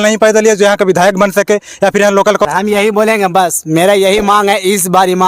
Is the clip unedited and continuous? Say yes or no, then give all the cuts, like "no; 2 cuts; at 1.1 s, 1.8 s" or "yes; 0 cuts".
no; 1 cut; at 2.5 s